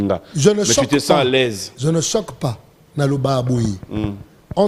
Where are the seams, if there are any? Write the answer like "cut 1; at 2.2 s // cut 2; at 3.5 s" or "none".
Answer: none